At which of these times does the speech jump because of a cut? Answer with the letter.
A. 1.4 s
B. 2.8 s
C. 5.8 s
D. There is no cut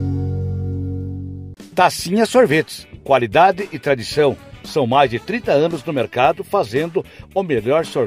A